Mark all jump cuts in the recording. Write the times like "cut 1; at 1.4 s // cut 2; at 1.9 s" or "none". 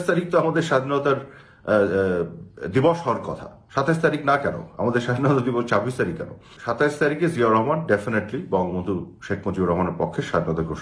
cut 1; at 6.5 s

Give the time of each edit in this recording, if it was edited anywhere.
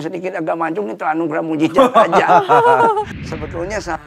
cut 1; at 3.1 s

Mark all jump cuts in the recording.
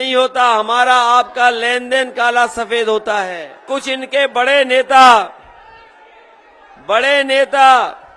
cut 1; at 3.6 s

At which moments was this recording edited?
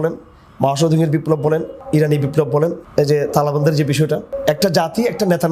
cut 1; at 1.8 s // cut 2; at 2.8 s // cut 3; at 4.3 s

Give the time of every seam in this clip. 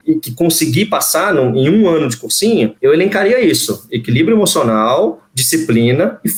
none

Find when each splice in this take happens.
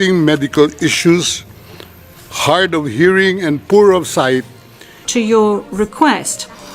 cut 1; at 5.0 s

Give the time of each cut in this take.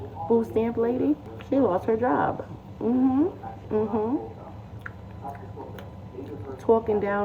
cut 1; at 1.3 s

